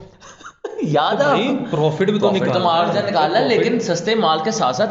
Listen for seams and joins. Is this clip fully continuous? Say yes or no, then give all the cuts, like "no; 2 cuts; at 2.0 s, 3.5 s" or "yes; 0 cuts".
yes; 0 cuts